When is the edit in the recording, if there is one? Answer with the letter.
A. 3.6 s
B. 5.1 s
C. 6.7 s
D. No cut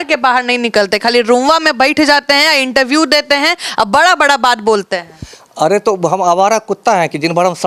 D